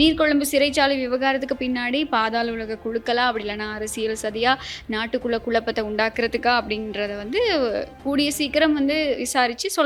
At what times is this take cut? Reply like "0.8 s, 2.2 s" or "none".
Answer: none

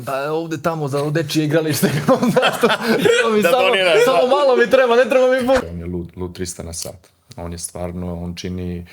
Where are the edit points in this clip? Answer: 5.6 s

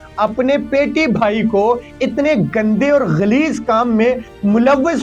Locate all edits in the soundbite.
none

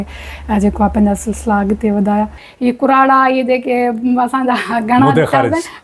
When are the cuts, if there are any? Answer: 2.4 s

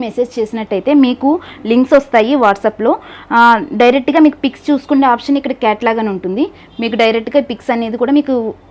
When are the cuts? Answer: none

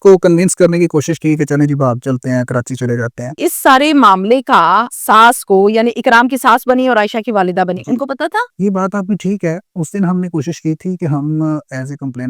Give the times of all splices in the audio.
3.4 s, 4.9 s, 8.5 s

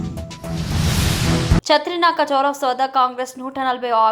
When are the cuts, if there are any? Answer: 1.4 s

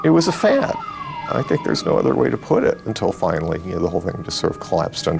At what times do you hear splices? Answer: 2.9 s

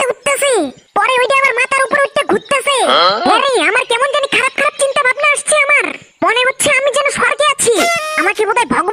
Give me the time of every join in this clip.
none

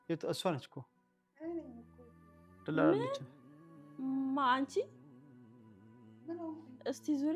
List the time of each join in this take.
4.9 s, 6.3 s

